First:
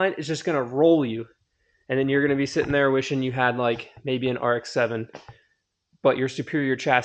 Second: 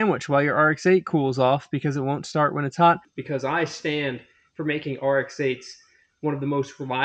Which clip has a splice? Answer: second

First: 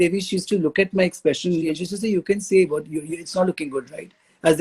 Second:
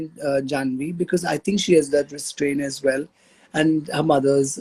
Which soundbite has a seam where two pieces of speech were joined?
first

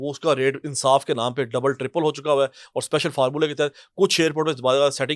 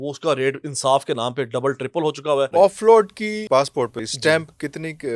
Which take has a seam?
second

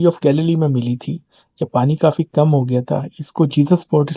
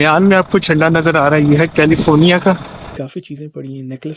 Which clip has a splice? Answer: second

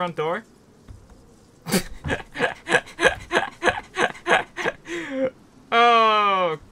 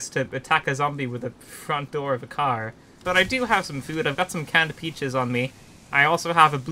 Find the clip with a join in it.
second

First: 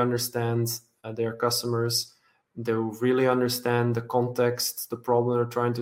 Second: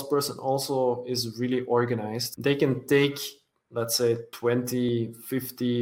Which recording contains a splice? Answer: second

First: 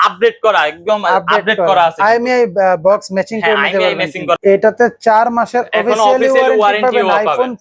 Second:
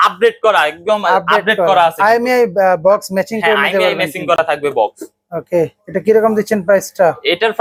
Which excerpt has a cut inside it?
first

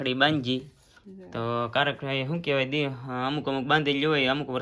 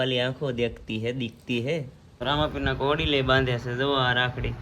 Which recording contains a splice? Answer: second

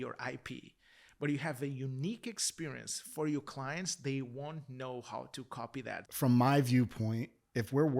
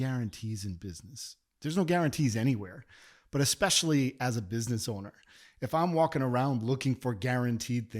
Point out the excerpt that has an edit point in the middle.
first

